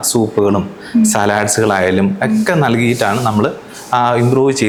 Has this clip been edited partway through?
no; 0 cuts

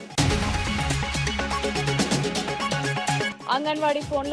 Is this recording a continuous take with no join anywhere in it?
no; 2 cuts; at 2.0 s, 3.4 s

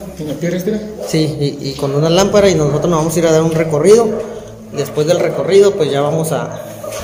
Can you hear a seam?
no; 0 cuts

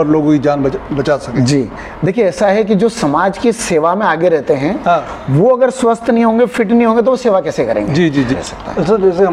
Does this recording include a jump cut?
yes; 1 cut; at 8.3 s

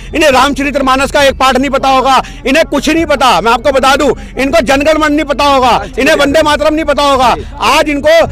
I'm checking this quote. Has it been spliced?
no; 0 cuts

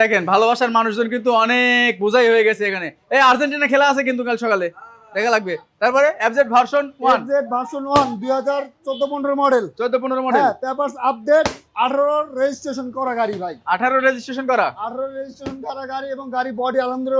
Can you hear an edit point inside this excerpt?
no; 0 cuts

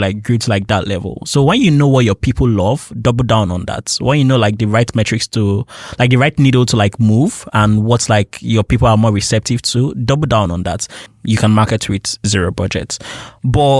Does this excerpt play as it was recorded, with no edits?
no; 1 cut; at 11.0 s

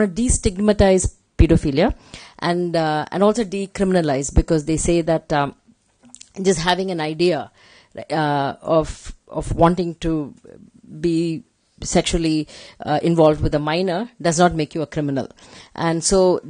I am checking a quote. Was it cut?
no; 0 cuts

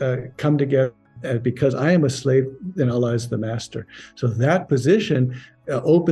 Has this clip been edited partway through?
yes; 1 cut; at 1.1 s

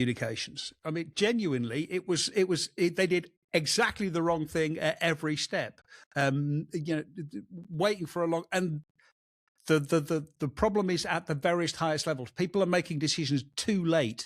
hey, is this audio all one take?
yes; 0 cuts

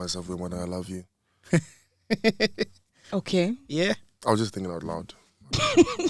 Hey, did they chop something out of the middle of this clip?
no; 0 cuts

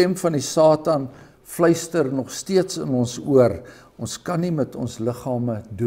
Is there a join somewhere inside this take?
no; 0 cuts

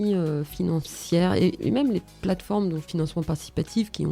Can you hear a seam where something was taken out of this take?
yes; 2 cuts; at 1.6 s, 2.9 s

